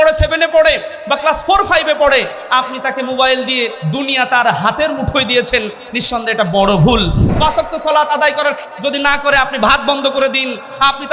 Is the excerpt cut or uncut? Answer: cut